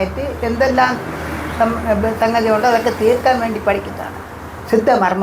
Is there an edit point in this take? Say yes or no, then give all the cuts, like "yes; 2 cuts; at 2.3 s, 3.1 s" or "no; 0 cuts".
no; 0 cuts